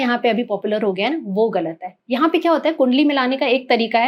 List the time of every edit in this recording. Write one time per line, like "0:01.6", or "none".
none